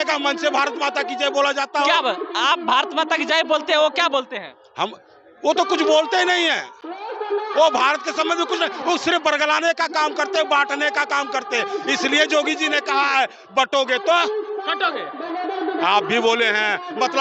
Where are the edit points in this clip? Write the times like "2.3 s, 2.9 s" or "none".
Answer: none